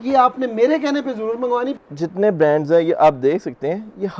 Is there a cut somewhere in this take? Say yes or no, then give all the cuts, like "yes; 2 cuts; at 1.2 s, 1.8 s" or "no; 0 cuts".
yes; 1 cut; at 1.8 s